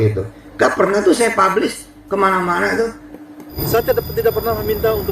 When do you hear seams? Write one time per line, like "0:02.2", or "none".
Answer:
0:03.4